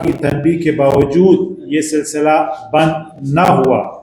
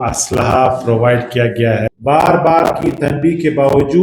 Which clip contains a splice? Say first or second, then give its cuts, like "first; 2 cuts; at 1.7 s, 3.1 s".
second; 1 cut; at 1.9 s